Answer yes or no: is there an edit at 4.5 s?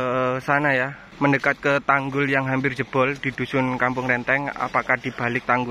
no